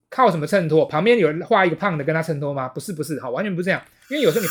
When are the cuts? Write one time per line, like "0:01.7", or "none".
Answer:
none